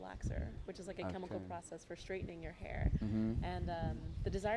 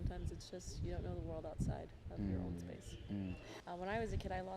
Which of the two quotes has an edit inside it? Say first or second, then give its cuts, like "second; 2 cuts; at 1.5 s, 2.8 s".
second; 1 cut; at 3.5 s